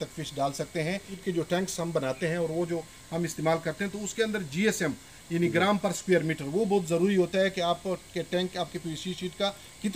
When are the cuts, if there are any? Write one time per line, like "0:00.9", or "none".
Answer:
0:01.1

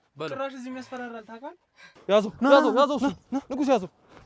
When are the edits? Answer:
0:02.0

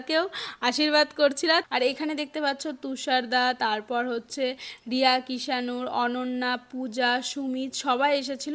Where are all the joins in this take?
0:01.7

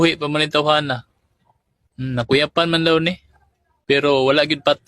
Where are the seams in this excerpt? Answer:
0:02.6

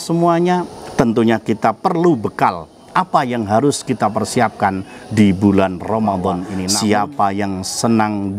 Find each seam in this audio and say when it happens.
0:06.5

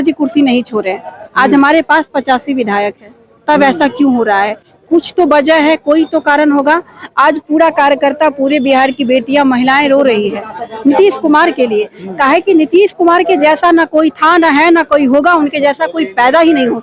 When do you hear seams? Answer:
none

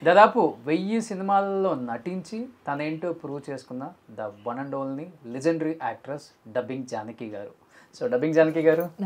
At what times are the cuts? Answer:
none

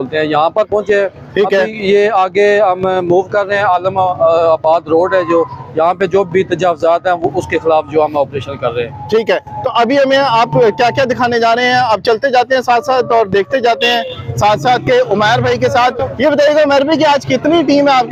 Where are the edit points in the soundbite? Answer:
none

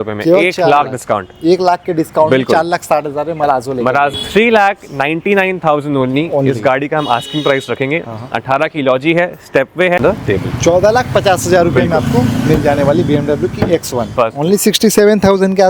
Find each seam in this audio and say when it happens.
0:04.1
0:10.0
0:14.1

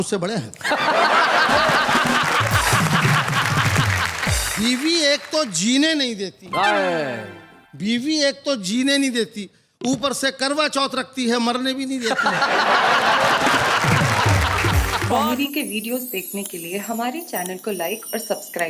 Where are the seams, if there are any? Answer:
0:15.1

